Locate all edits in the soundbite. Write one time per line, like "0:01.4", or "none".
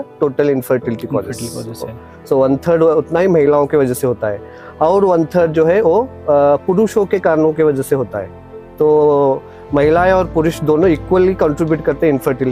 none